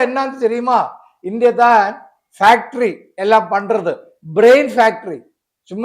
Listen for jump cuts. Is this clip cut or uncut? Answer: uncut